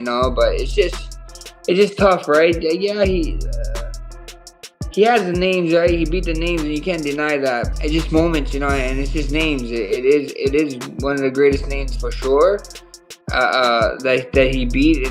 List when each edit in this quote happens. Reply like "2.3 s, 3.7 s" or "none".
7.7 s